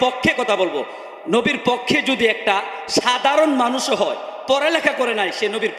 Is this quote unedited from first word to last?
yes; 0 cuts

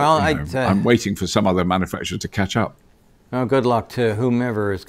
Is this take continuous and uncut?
yes; 0 cuts

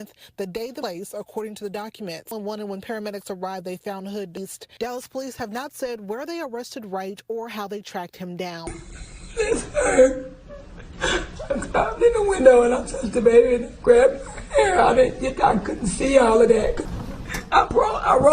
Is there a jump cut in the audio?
yes; 3 cuts; at 2.3 s, 8.7 s, 16.9 s

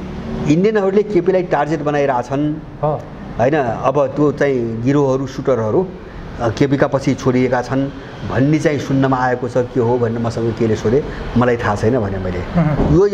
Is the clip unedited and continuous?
yes; 0 cuts

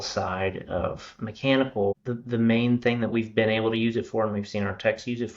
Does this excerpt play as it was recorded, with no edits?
no; 1 cut; at 2.0 s

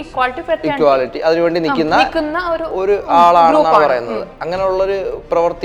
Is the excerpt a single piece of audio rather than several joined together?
yes; 0 cuts

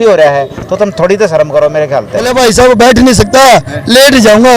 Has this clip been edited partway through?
yes; 1 cut; at 2.2 s

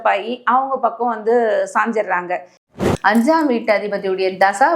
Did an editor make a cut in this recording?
yes; 1 cut; at 2.5 s

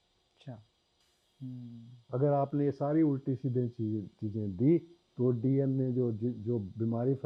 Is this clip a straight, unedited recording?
yes; 0 cuts

